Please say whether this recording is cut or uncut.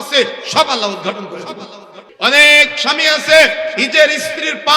cut